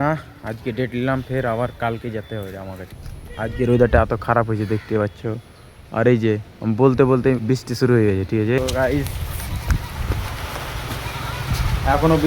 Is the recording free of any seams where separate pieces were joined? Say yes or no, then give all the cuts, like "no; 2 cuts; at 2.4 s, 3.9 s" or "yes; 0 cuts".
no; 2 cuts; at 2.8 s, 8.6 s